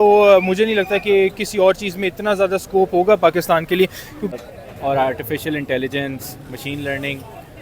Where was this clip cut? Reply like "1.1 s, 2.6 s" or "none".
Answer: 4.3 s